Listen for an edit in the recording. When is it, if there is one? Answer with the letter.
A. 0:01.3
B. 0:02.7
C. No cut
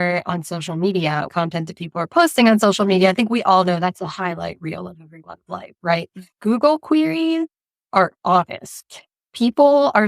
A